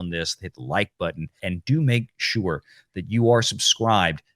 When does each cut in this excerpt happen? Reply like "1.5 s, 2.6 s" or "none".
1.4 s